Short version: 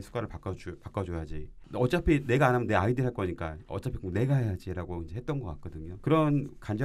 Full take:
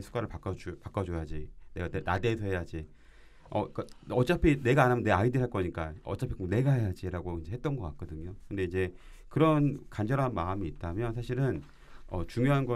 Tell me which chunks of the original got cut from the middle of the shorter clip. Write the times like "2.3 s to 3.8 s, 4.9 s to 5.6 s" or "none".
1.6 s to 4.0 s, 8.2 s to 9.1 s